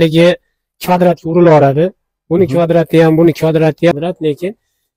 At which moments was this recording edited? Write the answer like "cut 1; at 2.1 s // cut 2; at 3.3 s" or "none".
cut 1; at 3.9 s

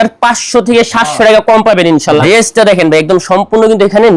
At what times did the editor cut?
cut 1; at 2.2 s

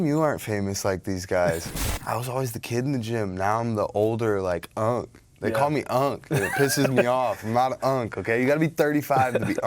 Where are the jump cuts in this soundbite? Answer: cut 1; at 1.7 s

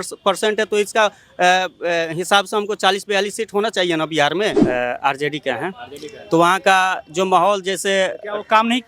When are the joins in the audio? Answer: cut 1; at 4.6 s

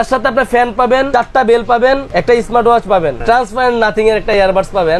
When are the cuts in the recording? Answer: cut 1; at 1.1 s // cut 2; at 2.1 s // cut 3; at 3.2 s

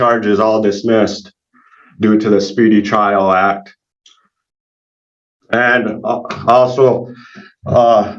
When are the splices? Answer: none

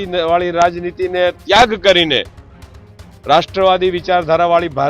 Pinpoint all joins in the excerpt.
none

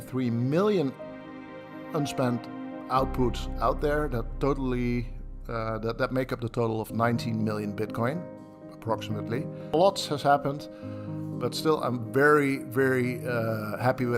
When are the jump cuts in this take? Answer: cut 1; at 9.7 s

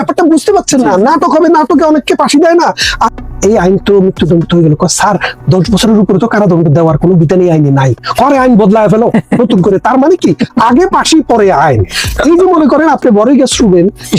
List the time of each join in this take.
cut 1; at 3.1 s

